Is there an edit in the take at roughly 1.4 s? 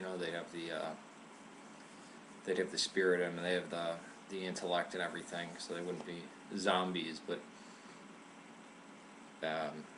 yes; 1 cut; at 1.4 s

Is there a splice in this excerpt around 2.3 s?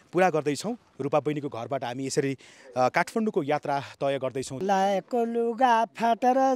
no; 1 cut; at 4.5 s

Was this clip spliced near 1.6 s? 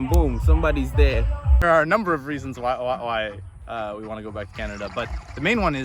yes; 1 cut; at 1.6 s

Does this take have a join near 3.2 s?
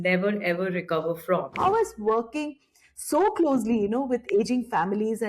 no; 1 cut; at 1.5 s

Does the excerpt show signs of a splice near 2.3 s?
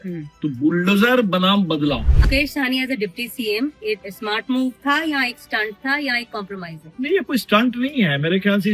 yes; 1 cut; at 2.3 s

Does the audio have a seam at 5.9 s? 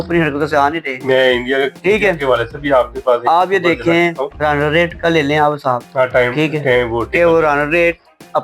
yes; 2 cuts; at 4.3 s, 5.9 s

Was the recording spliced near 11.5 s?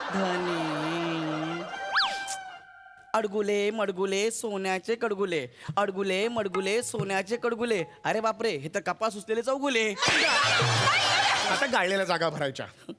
yes; 1 cut; at 11.5 s

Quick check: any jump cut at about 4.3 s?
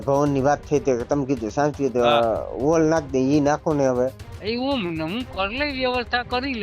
yes; 1 cut; at 4.3 s

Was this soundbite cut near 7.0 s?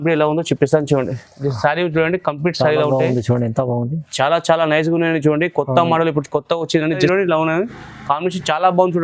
yes; 1 cut; at 7.0 s

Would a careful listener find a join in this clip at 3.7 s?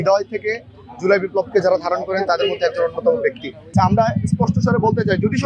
yes; 1 cut; at 3.7 s

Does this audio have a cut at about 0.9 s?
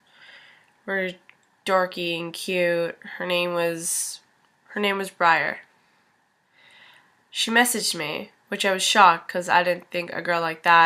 yes; 1 cut; at 0.9 s

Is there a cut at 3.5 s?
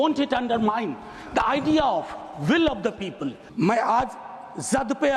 yes; 1 cut; at 3.5 s

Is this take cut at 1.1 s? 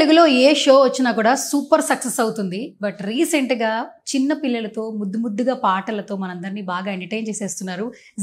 no; 0 cuts

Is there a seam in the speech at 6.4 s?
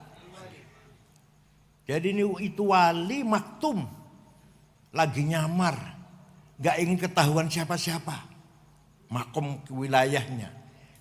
no; 0 cuts

